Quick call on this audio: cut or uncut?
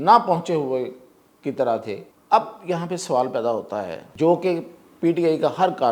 cut